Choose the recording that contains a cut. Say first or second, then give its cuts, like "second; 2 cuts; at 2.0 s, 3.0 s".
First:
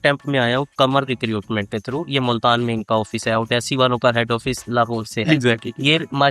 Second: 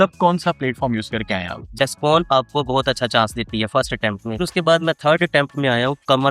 second; 2 cuts; at 1.7 s, 4.4 s